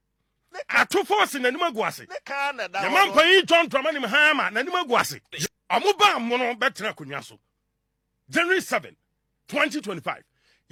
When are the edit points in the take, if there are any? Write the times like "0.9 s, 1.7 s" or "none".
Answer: none